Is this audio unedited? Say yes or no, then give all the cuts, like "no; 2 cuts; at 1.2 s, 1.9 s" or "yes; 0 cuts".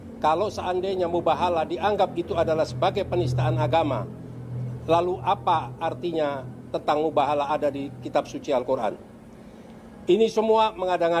yes; 0 cuts